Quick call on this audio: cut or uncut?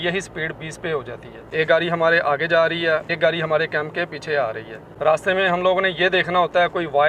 cut